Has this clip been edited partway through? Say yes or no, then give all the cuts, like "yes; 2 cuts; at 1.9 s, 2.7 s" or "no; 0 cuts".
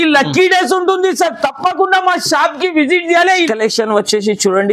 yes; 1 cut; at 3.5 s